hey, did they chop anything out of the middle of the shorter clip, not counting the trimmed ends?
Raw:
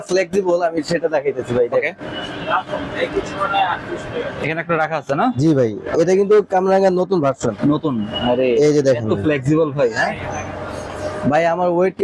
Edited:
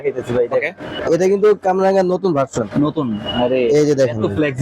yes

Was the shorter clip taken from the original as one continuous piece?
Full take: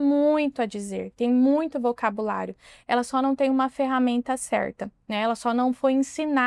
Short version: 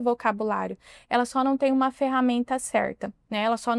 yes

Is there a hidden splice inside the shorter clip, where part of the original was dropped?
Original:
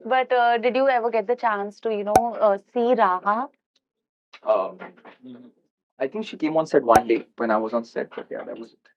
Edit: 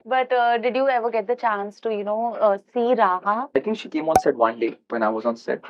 yes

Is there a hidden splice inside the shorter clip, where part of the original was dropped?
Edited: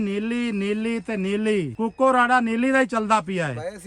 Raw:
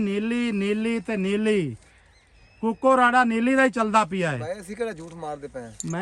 yes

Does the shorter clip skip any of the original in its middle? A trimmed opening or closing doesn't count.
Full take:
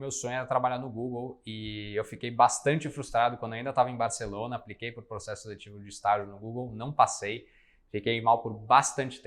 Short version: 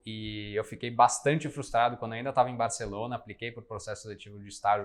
no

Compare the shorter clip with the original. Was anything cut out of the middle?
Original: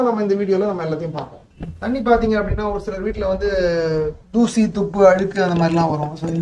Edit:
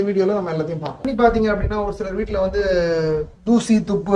yes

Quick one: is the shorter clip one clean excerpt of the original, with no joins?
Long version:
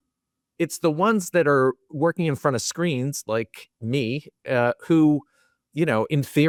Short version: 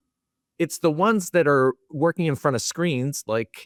yes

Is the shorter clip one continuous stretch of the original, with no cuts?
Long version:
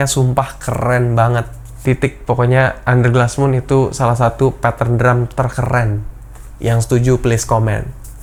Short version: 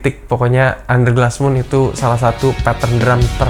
yes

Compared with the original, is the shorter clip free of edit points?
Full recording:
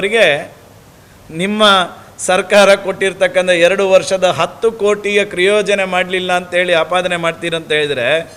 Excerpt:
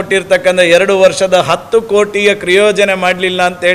yes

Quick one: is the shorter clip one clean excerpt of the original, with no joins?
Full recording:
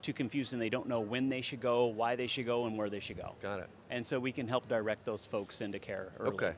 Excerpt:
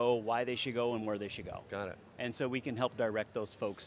yes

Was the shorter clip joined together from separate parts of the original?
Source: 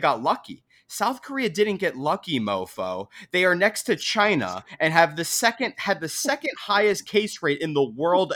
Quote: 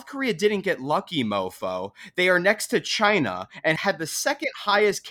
yes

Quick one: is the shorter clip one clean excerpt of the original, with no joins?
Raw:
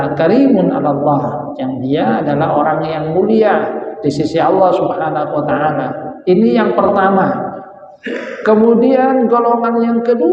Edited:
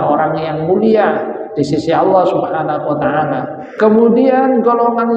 no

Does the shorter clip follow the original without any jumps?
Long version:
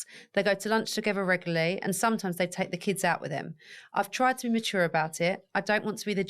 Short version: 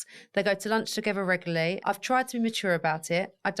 no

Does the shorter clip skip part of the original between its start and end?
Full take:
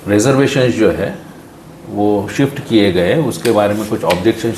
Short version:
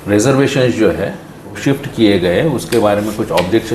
yes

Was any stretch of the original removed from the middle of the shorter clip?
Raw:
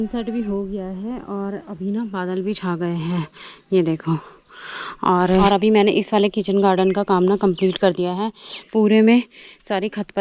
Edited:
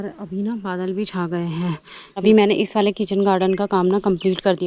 yes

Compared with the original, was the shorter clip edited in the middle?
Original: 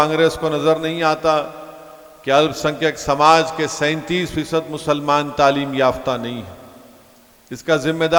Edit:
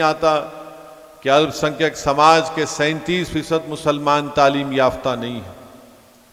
no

